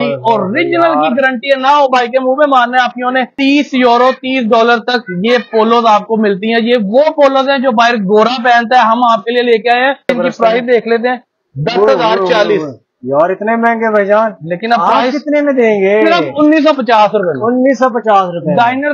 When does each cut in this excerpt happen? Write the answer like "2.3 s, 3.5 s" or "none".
3.3 s, 10.1 s